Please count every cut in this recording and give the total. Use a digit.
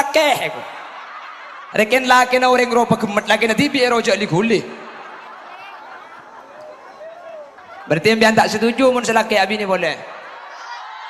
1